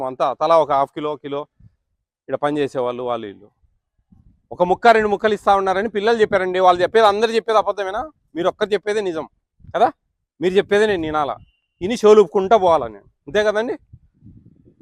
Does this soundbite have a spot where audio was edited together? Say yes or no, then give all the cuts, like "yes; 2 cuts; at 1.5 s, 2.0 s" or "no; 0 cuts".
no; 0 cuts